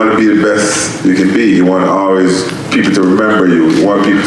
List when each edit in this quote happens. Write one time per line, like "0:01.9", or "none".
none